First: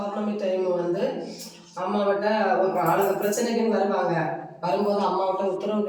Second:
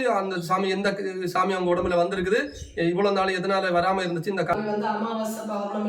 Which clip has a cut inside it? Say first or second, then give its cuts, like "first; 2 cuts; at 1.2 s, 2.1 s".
second; 1 cut; at 4.5 s